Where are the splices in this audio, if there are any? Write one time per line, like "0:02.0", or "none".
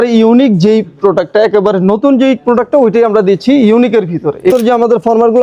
0:04.5